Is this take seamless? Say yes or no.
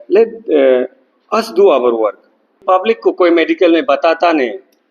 no